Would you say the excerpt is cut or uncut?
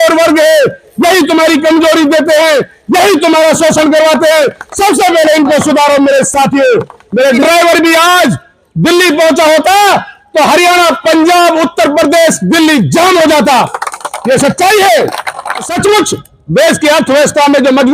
cut